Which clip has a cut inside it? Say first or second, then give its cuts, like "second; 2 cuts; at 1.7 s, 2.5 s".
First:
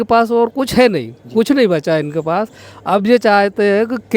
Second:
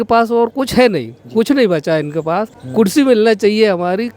second; 1 cut; at 2.6 s